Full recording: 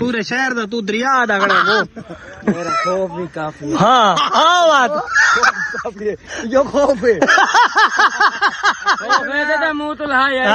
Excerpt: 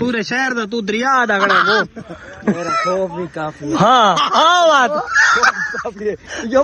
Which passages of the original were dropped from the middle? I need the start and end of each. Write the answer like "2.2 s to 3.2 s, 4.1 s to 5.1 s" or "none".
none